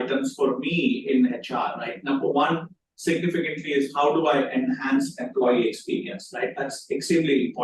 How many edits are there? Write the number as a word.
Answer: zero